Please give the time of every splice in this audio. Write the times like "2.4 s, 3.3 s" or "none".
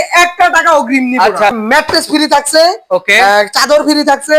1.6 s